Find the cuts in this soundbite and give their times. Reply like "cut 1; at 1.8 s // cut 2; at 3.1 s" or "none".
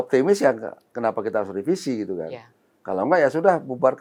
none